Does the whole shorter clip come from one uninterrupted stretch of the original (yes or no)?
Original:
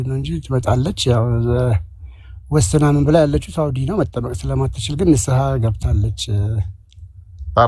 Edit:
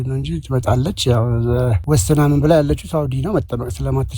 no